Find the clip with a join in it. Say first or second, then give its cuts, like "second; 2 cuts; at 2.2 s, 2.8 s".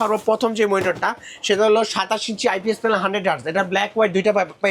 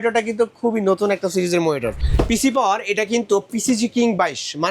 second; 1 cut; at 2.0 s